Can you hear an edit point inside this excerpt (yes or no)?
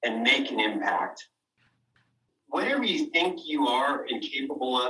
yes